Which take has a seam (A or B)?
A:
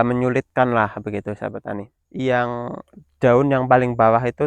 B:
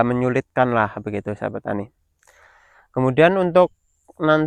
A